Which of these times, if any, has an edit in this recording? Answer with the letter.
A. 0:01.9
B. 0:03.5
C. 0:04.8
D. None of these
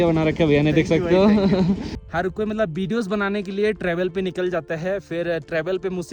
A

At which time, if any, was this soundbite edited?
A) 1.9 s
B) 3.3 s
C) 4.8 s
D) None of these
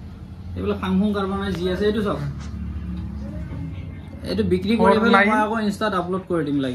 D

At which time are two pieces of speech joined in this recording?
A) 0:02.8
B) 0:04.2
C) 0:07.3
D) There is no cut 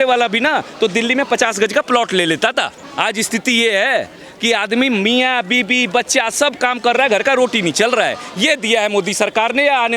A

